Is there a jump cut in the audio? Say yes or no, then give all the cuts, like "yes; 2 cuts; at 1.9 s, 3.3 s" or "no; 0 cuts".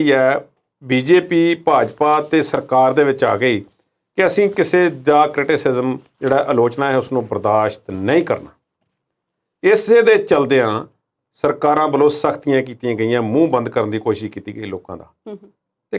no; 0 cuts